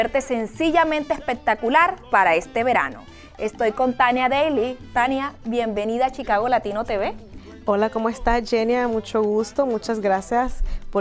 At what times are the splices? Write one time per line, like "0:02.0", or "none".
0:04.8